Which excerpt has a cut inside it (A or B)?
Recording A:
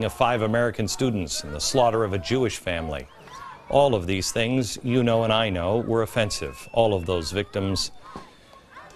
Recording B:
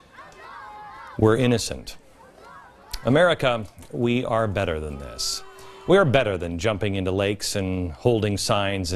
A